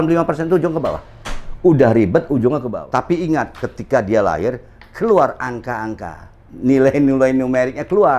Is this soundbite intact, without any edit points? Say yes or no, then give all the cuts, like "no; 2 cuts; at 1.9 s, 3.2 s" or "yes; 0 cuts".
no; 1 cut; at 2.7 s